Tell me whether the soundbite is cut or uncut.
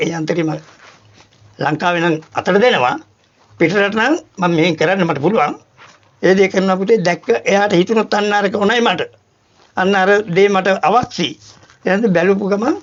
uncut